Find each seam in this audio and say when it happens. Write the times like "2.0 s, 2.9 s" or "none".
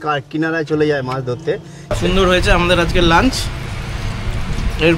1.9 s

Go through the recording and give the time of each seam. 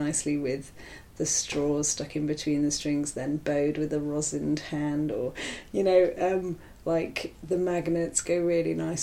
none

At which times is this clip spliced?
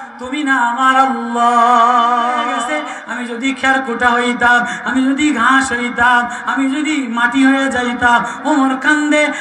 2.6 s

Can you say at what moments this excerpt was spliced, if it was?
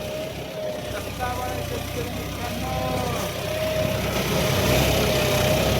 4.5 s

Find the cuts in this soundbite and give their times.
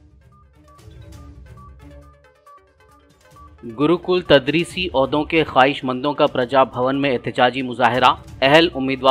2.1 s, 3.0 s

